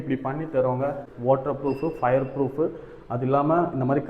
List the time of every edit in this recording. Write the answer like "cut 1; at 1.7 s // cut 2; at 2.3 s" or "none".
cut 1; at 1.1 s